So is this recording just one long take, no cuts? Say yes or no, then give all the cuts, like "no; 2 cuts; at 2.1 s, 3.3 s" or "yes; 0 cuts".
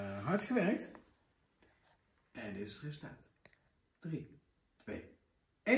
yes; 0 cuts